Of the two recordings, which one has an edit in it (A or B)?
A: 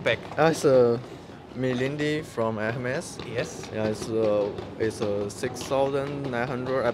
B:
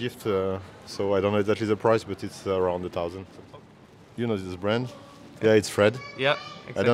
B